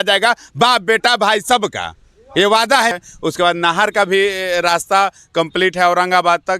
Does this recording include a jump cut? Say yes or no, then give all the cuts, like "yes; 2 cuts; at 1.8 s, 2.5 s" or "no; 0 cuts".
yes; 1 cut; at 2.9 s